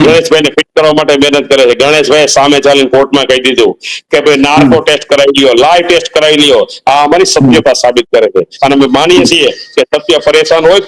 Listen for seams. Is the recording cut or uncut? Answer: uncut